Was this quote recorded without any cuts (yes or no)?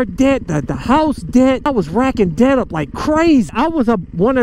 no